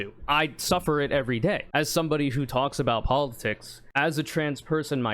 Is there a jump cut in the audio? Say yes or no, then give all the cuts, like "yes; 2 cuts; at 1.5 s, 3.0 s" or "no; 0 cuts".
yes; 1 cut; at 3.9 s